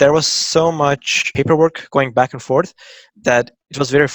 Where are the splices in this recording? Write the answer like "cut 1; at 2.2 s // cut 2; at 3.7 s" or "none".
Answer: cut 1; at 1.2 s